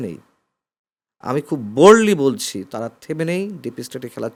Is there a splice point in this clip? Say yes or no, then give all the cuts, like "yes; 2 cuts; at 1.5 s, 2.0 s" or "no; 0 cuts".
no; 0 cuts